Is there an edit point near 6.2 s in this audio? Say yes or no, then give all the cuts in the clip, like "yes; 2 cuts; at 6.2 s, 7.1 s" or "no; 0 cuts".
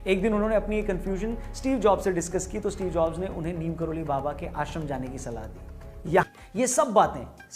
yes; 1 cut; at 6.2 s